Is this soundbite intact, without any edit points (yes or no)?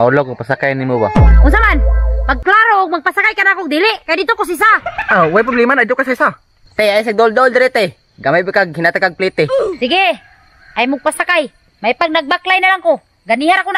yes